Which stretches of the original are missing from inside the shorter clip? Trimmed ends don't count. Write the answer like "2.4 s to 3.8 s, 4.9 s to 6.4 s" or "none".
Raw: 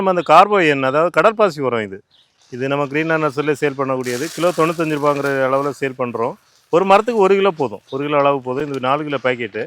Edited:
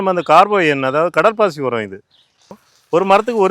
2.6 s to 6.4 s